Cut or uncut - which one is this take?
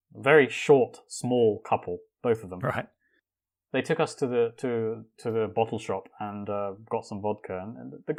uncut